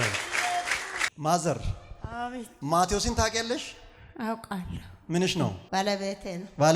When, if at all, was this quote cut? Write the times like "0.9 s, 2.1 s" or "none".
1.1 s, 5.7 s